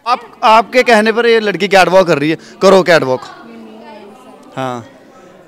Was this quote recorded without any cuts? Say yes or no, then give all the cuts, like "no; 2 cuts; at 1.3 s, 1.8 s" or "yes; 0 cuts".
yes; 0 cuts